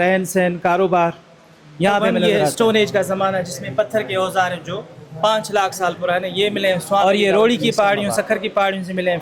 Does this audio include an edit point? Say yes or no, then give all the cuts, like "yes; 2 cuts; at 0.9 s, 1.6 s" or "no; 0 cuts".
yes; 2 cuts; at 2.1 s, 7.0 s